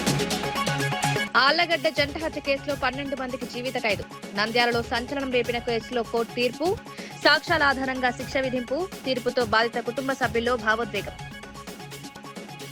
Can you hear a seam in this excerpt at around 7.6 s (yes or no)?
no